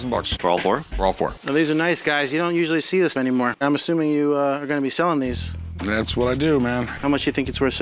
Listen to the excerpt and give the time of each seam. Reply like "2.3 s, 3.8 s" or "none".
1.4 s, 3.6 s, 6.9 s